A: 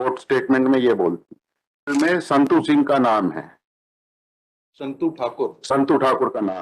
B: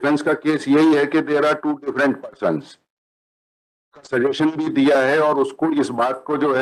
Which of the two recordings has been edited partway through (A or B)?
A